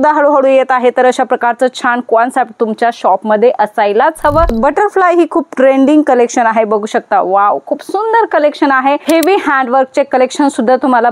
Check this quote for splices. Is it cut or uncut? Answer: cut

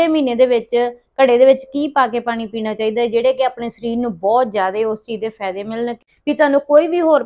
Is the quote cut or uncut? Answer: cut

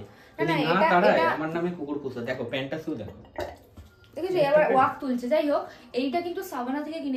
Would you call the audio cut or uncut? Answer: uncut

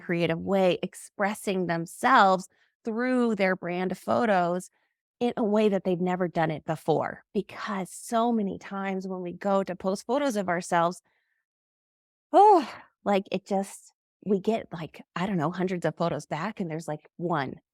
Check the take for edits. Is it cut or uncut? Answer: uncut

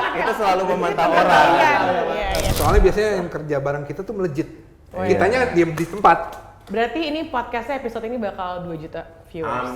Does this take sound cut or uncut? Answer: cut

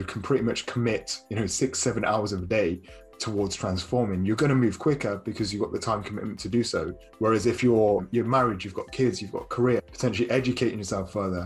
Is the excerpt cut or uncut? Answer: cut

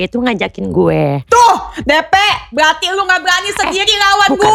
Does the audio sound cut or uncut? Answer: uncut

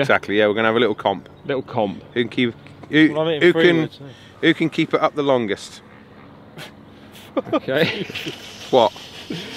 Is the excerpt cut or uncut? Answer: uncut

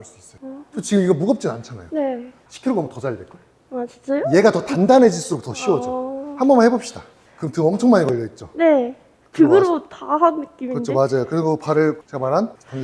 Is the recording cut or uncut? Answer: uncut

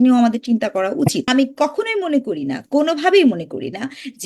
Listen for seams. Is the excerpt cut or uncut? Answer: cut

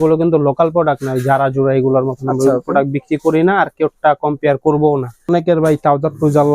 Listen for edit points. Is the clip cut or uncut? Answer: cut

